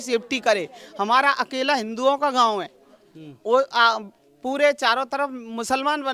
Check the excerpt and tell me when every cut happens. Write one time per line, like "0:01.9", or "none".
none